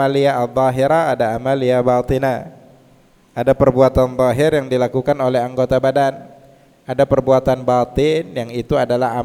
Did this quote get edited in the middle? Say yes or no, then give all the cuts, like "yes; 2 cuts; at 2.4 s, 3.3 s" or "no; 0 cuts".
no; 0 cuts